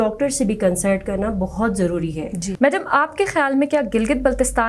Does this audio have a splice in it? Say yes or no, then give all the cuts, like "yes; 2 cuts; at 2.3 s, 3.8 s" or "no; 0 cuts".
no; 0 cuts